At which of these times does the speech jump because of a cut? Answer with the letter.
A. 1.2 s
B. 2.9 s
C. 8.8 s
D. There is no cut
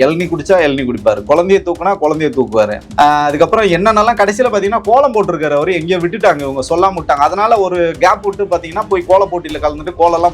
B